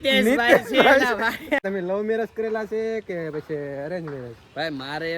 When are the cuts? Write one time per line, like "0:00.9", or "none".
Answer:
0:01.6